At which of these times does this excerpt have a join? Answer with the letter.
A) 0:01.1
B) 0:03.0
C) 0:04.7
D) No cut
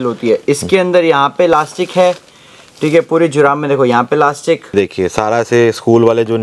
C